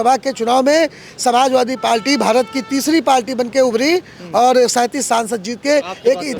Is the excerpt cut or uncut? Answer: uncut